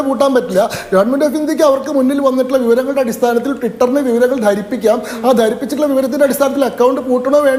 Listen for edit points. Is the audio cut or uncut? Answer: uncut